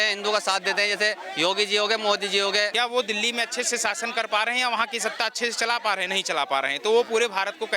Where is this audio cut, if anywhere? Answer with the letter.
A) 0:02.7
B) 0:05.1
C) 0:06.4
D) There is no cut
A